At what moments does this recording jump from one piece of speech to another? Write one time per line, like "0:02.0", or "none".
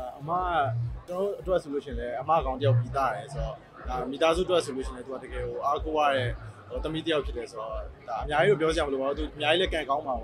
0:01.0